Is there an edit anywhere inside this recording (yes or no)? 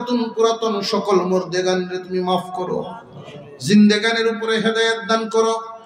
no